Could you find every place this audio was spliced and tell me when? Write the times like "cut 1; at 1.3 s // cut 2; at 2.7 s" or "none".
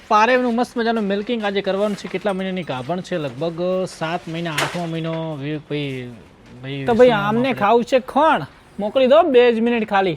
cut 1; at 6.8 s